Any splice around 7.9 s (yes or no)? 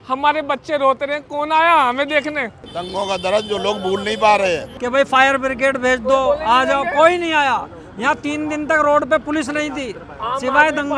no